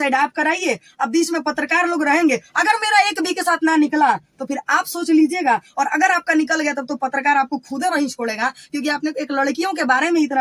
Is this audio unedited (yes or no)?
yes